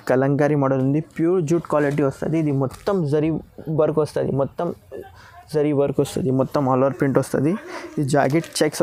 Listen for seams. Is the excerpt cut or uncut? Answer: uncut